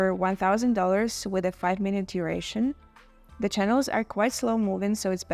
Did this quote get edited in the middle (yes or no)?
no